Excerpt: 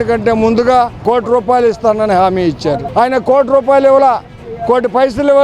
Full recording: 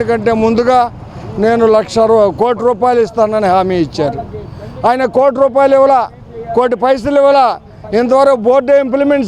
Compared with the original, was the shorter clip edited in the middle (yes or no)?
yes